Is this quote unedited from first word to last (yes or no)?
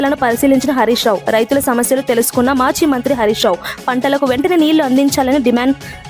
yes